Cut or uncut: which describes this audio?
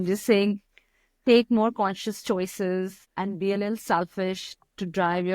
cut